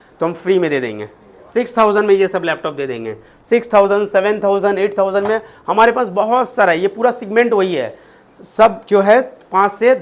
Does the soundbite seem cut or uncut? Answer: uncut